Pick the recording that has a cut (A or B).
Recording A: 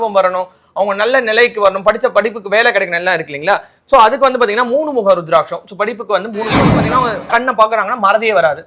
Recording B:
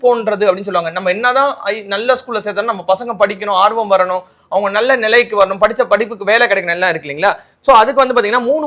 A